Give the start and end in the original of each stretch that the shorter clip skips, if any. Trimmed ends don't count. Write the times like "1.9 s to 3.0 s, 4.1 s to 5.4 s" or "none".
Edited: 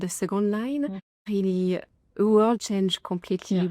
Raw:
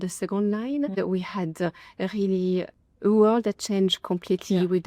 0.9 s to 1.8 s, 3.4 s to 3.6 s